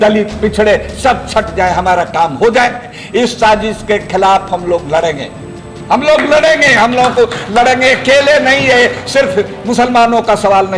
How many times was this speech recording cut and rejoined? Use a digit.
1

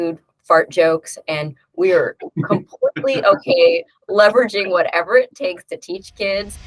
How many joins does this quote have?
0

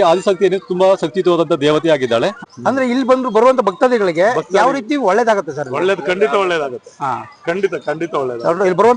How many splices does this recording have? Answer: 1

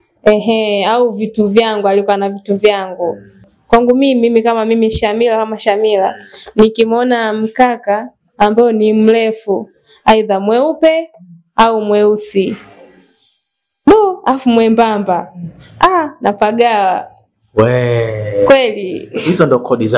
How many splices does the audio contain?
1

